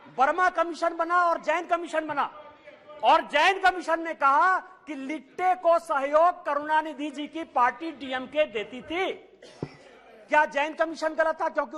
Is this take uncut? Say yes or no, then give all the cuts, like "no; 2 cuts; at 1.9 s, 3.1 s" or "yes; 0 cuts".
yes; 0 cuts